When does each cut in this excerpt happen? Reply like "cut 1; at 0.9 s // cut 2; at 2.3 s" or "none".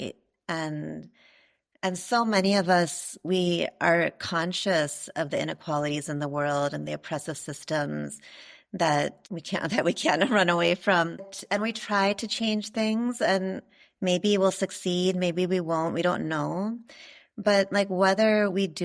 cut 1; at 9.2 s // cut 2; at 11.4 s